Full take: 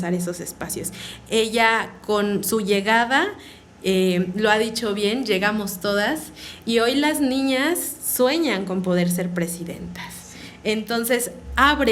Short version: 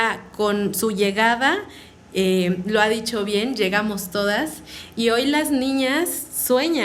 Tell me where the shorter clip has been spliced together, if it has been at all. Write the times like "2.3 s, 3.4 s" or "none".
none

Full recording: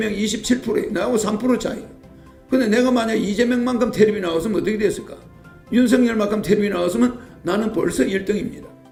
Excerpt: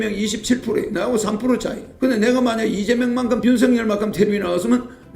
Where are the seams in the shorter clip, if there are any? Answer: 1.8 s, 3.4 s

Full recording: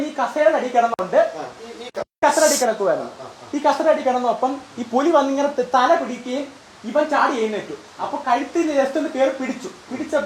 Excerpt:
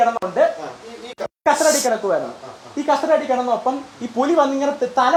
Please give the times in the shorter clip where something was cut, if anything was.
none

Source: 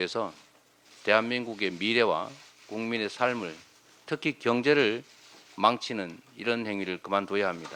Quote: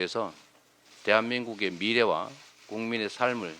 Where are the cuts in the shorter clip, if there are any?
none

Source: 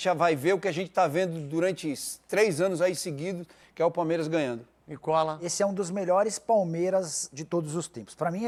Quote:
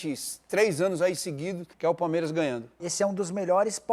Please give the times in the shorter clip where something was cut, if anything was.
1.6 s, 2.8 s

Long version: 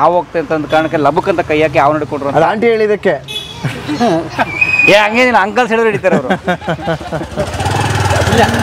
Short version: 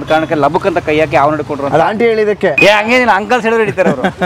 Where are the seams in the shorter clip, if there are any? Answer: 2.6 s

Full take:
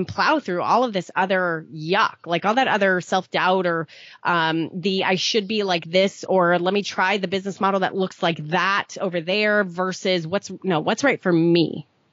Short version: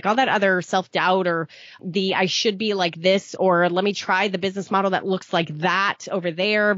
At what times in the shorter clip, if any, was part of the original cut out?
1.8 s

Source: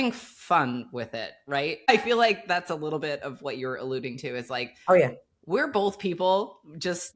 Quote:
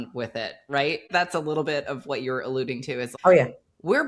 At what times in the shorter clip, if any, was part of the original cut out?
1.1 s, 3.1 s

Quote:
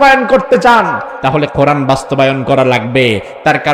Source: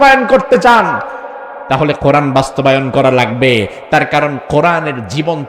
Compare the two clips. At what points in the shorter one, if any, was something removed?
1.1 s

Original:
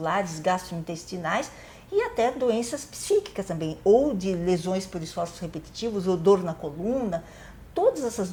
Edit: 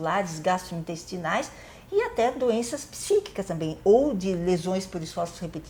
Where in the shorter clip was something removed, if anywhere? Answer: none

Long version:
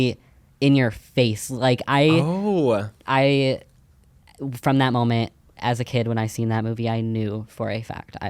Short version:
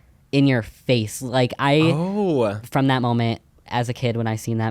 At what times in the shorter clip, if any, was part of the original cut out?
2.6 s

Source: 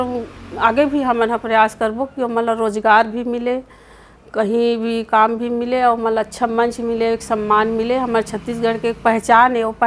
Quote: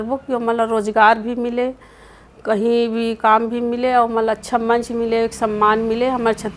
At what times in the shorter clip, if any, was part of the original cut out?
none

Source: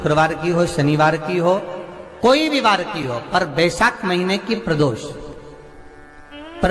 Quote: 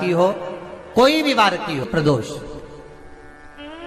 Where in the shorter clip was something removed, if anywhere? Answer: 1.9 s

